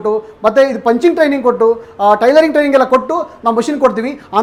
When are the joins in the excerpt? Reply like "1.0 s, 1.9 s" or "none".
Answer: none